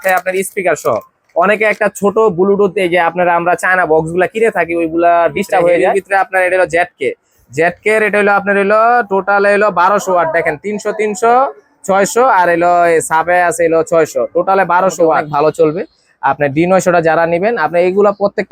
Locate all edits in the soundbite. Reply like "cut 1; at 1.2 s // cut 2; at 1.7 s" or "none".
cut 1; at 6.0 s // cut 2; at 15.3 s